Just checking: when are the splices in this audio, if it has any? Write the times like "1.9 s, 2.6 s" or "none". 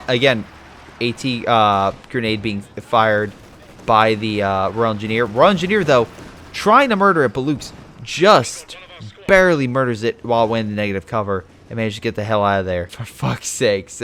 13.0 s

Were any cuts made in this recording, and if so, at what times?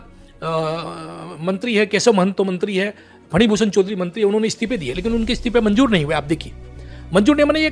none

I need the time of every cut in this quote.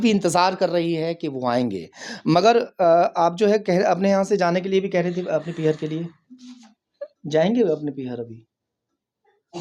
none

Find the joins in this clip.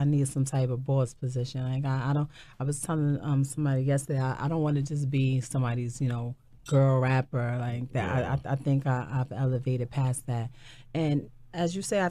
7.0 s

